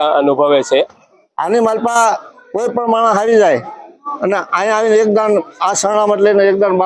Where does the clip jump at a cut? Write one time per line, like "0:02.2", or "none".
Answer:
0:01.0